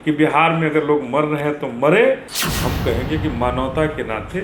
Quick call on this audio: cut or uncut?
cut